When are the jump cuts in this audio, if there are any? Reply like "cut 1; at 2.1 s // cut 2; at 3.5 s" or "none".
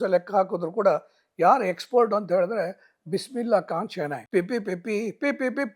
cut 1; at 4.2 s